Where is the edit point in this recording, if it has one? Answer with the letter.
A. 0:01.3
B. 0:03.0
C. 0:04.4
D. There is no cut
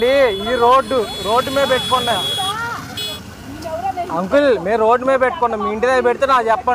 B